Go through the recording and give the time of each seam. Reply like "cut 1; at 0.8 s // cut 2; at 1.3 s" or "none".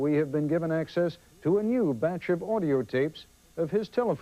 cut 1; at 2.1 s